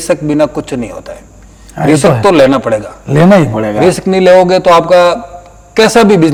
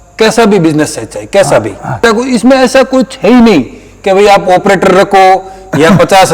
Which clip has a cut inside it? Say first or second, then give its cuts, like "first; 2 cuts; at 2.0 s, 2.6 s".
second; 1 cut; at 2.0 s